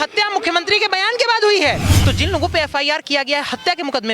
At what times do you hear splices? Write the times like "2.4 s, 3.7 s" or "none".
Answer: 1.9 s